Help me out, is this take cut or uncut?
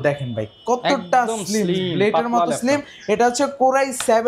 uncut